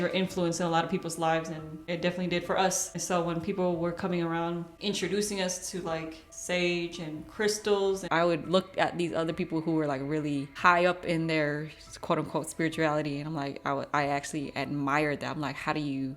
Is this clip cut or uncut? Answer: cut